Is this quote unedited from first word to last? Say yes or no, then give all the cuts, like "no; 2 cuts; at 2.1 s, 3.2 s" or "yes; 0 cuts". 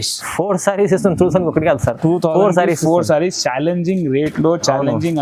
yes; 0 cuts